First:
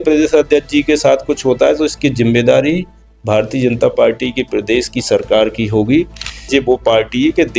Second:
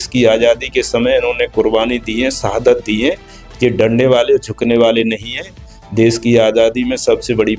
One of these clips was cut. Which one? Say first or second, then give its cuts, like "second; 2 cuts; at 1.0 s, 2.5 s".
first; 1 cut; at 6.5 s